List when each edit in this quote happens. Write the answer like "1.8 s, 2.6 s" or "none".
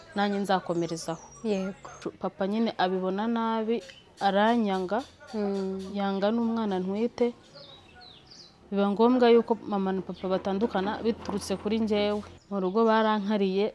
2.1 s, 12.3 s